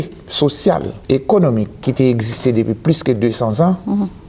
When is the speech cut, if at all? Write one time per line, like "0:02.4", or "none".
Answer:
0:00.9
0:01.8